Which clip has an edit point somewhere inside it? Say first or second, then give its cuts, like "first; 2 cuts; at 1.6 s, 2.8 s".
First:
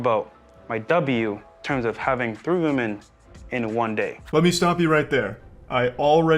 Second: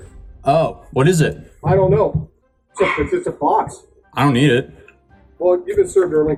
first; 1 cut; at 4.2 s